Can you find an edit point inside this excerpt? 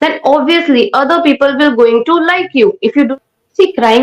yes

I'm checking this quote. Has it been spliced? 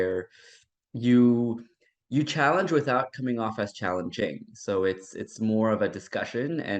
no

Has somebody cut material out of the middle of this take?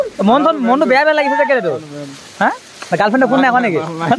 no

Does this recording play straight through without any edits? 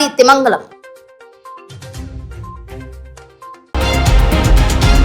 no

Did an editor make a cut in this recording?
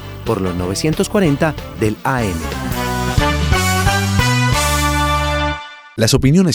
no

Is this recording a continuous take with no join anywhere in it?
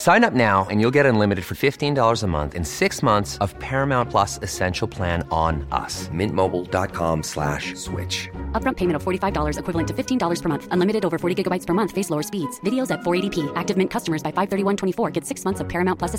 yes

